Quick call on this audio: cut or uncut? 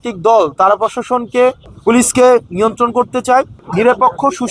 cut